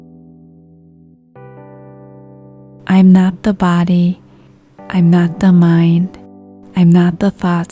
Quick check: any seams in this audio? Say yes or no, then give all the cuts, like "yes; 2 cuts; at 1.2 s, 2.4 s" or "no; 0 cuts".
yes; 1 cut; at 2.8 s